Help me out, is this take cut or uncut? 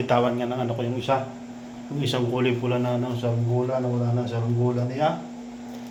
uncut